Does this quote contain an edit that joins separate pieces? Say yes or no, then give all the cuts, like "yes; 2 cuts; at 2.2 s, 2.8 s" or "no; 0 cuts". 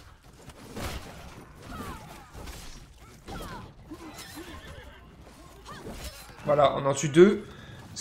no; 0 cuts